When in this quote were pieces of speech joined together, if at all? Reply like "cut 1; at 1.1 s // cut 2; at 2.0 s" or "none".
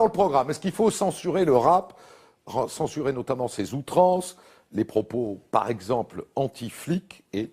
cut 1; at 1.2 s